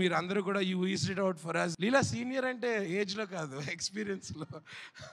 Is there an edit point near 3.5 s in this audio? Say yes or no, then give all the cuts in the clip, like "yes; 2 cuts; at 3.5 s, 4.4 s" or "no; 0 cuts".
no; 1 cut; at 1.7 s